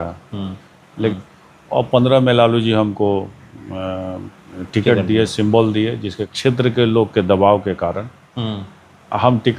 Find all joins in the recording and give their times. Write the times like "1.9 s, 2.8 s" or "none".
1.1 s, 6.2 s